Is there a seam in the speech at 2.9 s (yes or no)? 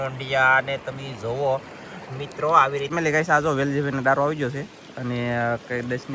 yes